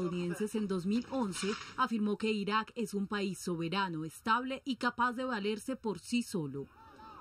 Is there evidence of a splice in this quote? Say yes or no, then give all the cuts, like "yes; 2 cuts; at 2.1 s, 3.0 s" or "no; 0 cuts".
yes; 1 cut; at 3.4 s